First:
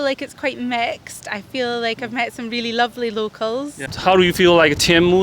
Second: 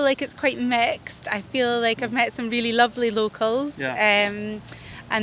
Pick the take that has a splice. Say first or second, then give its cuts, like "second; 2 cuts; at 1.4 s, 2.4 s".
first; 1 cut; at 3.8 s